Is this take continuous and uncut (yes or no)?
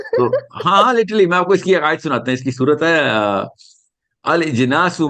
yes